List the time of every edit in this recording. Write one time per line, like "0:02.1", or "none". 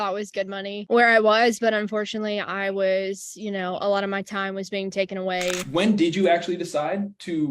0:05.6

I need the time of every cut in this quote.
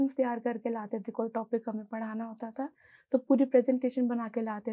none

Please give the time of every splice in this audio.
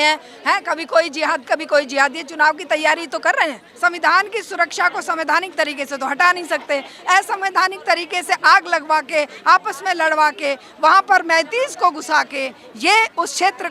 0:03.7

